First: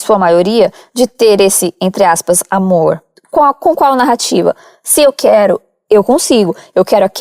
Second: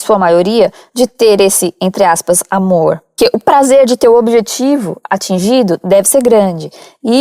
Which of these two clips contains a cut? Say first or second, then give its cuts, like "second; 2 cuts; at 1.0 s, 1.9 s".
first; 1 cut; at 3.1 s